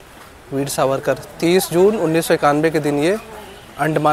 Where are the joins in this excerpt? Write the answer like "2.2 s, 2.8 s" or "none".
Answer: none